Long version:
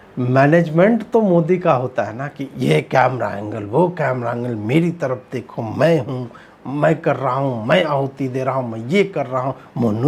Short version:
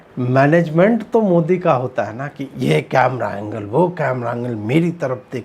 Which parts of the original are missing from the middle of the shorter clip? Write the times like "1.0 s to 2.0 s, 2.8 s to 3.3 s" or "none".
none